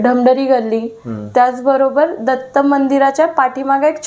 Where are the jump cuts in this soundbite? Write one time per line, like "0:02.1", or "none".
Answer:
none